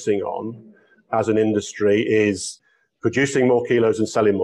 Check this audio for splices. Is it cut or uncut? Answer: cut